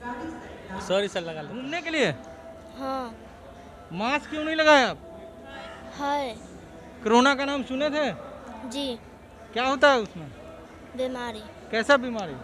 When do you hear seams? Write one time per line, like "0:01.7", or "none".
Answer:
0:01.5